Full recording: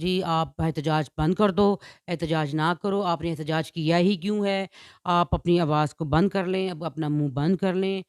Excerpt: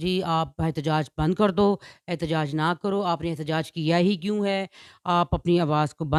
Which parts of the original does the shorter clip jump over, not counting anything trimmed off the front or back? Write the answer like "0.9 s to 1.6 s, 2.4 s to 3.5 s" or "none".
none